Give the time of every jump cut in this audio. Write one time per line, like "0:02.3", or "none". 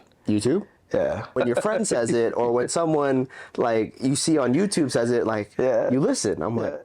0:01.4